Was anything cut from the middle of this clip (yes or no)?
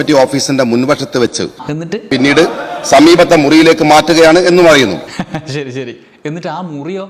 yes